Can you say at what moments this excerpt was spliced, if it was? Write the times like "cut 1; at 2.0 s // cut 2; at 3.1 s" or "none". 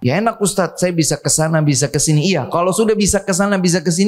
none